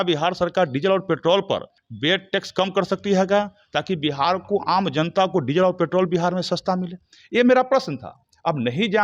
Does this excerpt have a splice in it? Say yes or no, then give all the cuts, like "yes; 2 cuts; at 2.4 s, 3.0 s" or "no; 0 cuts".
no; 0 cuts